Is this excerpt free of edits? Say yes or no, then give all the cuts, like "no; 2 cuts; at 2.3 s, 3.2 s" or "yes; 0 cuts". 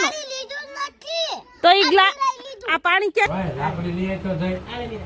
no; 1 cut; at 3.3 s